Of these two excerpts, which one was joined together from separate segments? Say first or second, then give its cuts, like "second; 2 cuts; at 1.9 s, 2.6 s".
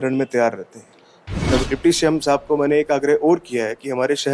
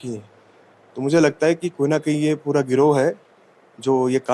first; 1 cut; at 1.2 s